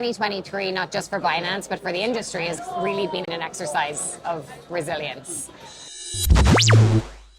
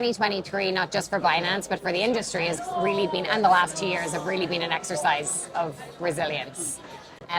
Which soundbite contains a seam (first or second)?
first